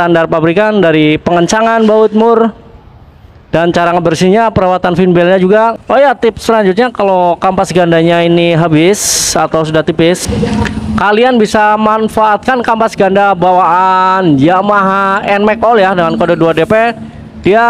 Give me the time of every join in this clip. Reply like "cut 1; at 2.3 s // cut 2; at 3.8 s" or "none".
cut 1; at 5.8 s